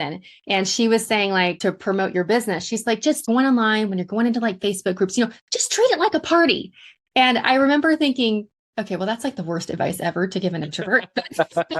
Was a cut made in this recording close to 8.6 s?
yes; 3 cuts; at 1.6 s, 3.2 s, 8.6 s

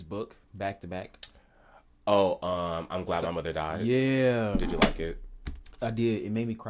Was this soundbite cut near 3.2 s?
no; 0 cuts

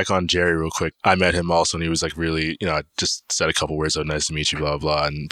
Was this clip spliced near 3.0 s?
no; 1 cut; at 0.9 s

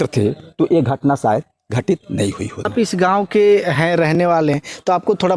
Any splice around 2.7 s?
yes; 1 cut; at 2.7 s

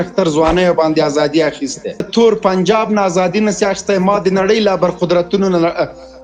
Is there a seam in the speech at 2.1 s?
yes; 1 cut; at 2.1 s

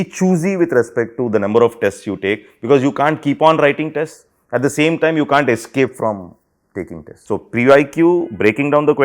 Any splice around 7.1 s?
yes; 1 cut; at 7.1 s

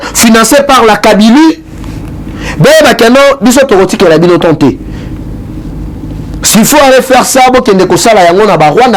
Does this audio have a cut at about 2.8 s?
no; 0 cuts

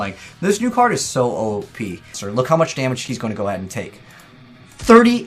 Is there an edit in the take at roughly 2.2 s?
yes; 1 cut; at 2.2 s

